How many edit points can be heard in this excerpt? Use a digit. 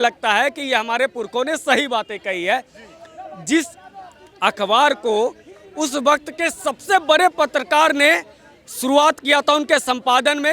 0